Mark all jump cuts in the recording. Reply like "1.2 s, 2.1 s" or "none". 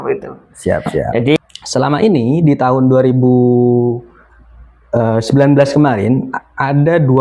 1.4 s